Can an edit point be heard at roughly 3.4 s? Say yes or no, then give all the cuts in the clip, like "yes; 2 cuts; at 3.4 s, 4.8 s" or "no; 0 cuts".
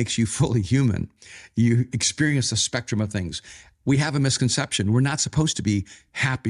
no; 0 cuts